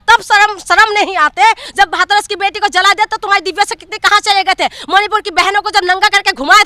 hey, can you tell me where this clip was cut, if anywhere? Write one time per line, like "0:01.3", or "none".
0:01.6